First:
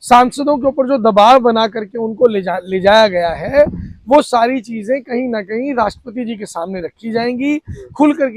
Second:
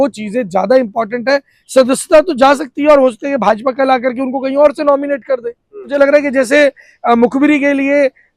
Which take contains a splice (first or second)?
second